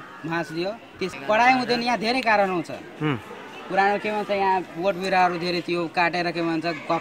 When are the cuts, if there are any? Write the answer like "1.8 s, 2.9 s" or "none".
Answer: 1.1 s